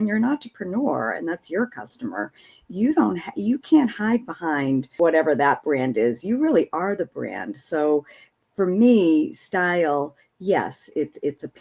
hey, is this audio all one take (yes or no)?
no